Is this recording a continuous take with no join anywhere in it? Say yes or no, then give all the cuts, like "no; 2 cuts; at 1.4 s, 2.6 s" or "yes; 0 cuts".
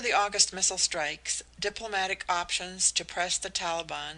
yes; 0 cuts